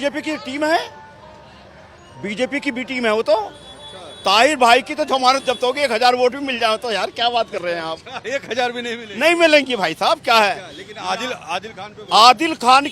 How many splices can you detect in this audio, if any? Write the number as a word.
zero